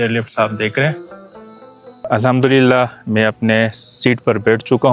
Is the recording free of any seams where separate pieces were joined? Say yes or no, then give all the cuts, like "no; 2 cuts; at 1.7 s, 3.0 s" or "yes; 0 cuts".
yes; 0 cuts